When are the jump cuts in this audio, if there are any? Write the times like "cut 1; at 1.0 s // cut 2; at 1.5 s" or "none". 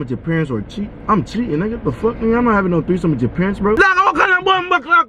cut 1; at 3.8 s